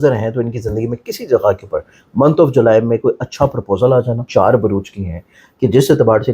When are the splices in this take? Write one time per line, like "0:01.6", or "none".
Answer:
0:04.2